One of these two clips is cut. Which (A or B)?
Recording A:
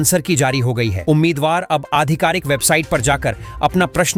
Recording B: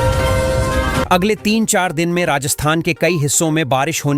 B